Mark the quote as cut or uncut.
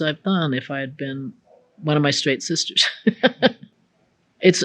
cut